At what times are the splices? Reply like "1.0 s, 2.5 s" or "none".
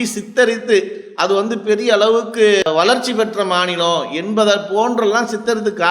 2.7 s